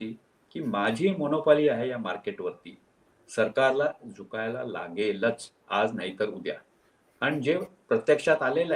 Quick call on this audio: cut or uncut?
uncut